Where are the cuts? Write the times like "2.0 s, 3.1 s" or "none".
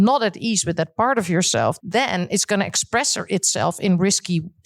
1.8 s